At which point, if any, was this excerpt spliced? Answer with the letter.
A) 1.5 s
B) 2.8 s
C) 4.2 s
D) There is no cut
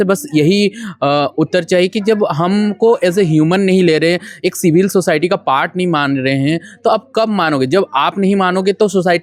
D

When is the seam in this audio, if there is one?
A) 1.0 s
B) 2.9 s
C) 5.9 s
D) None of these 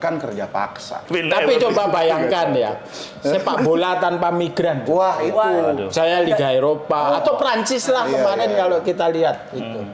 A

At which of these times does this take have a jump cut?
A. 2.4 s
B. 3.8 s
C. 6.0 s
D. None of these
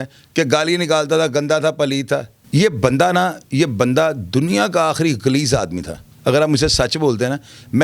A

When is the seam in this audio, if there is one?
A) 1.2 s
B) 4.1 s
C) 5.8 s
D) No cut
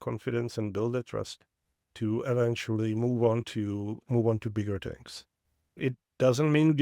C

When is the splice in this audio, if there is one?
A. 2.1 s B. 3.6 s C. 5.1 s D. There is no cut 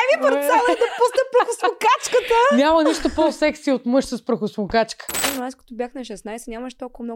C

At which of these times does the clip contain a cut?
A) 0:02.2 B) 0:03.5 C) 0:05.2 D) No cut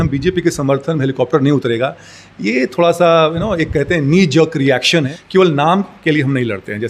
C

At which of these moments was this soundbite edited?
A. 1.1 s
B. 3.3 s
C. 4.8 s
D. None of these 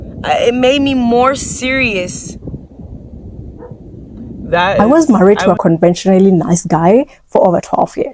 C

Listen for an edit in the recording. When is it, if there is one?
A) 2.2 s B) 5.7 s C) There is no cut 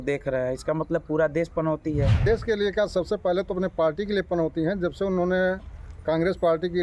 A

